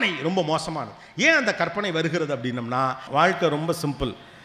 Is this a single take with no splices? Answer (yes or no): no